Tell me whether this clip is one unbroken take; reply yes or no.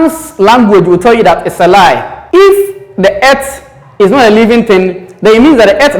no